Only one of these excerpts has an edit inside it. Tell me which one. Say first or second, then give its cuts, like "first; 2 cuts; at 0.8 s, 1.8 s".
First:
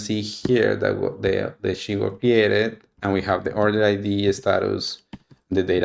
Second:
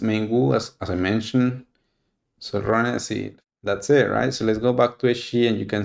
second; 1 cut; at 3.3 s